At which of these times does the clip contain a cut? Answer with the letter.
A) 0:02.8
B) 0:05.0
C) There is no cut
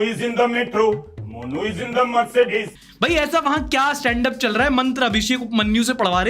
A